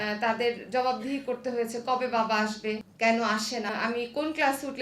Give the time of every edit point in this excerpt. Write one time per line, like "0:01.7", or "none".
0:02.9
0:03.7